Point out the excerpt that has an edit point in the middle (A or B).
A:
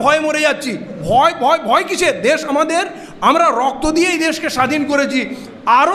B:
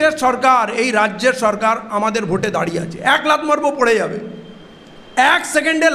A